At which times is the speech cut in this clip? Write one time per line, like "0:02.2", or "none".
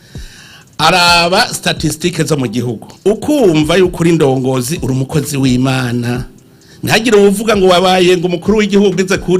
0:02.8

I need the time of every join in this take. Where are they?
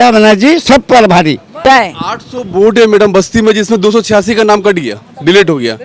0:01.6

